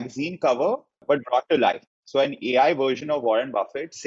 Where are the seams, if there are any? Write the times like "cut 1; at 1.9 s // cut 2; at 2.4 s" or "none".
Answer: cut 1; at 1.0 s

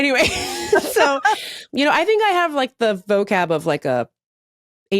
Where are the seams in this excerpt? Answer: cut 1; at 1.5 s

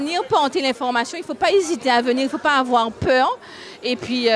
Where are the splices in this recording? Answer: none

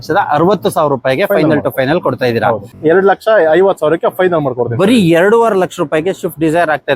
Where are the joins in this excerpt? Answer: cut 1; at 2.7 s

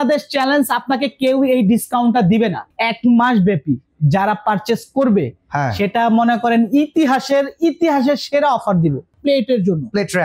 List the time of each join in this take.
cut 1; at 2.7 s // cut 2; at 9.1 s

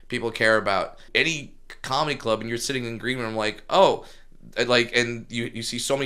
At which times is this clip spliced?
cut 1; at 1.0 s

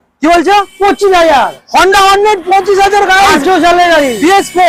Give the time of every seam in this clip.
none

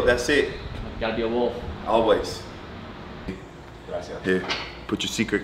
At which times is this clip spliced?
cut 1; at 3.3 s

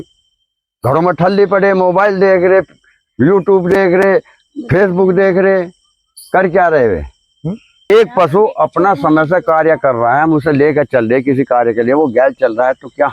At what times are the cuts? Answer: cut 1; at 7.9 s

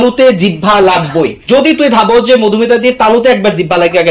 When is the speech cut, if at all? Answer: cut 1; at 1.4 s

